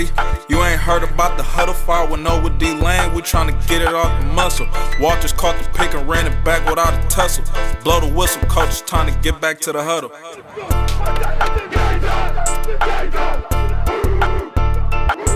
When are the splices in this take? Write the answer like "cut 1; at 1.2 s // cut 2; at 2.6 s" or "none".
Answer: none

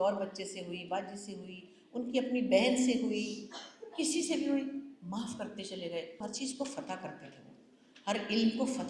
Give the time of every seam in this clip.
cut 1; at 6.2 s

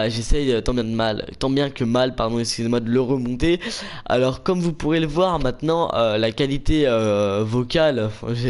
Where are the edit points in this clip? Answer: none

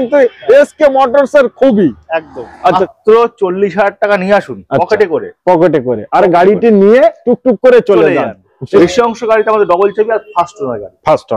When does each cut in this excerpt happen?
cut 1; at 2.8 s // cut 2; at 8.8 s

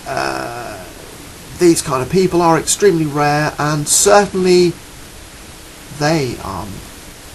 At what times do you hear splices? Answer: none

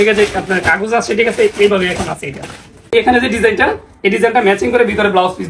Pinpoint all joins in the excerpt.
cut 1; at 2.9 s

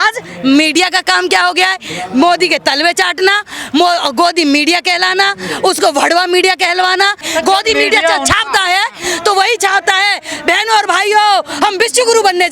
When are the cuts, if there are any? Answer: cut 1; at 7.2 s

